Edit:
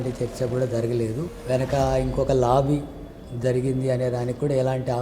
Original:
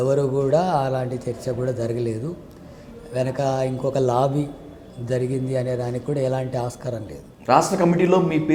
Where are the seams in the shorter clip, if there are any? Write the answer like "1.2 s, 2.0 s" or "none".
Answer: 1.3 s